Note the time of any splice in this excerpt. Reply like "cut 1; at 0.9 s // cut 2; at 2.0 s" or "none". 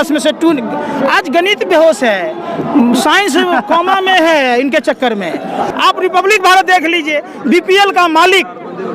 cut 1; at 5.7 s